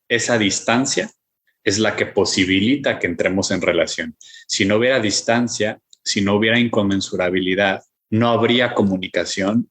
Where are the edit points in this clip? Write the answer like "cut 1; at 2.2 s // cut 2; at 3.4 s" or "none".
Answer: cut 1; at 7.9 s